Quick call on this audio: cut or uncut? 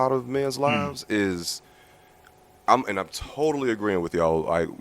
uncut